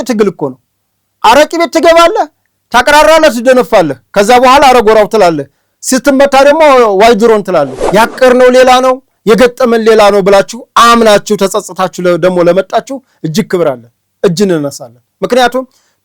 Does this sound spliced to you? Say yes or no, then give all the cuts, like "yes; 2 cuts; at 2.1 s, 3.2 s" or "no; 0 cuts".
yes; 1 cut; at 7.8 s